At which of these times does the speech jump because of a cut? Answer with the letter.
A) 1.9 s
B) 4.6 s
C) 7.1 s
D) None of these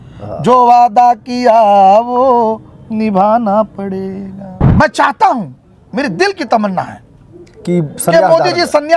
B